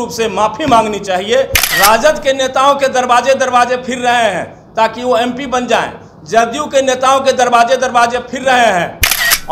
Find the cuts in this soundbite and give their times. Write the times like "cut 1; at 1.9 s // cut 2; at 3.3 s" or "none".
cut 1; at 1.6 s